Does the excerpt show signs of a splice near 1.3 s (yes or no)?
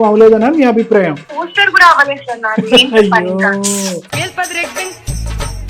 yes